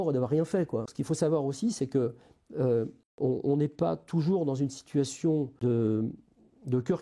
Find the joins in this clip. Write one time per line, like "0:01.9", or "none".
0:00.9
0:03.0
0:05.5